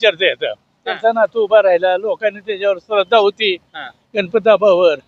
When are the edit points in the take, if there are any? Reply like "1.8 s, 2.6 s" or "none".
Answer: 0.9 s